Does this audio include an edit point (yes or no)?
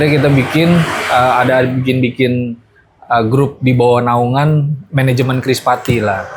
no